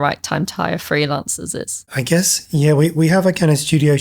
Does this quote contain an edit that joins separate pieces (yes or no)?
no